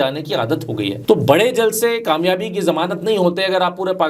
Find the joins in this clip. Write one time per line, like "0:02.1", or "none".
0:01.0